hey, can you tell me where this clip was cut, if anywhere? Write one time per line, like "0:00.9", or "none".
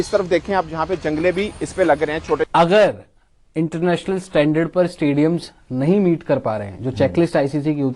0:02.5